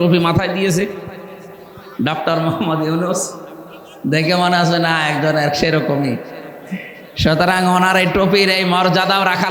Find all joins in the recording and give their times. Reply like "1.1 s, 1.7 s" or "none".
none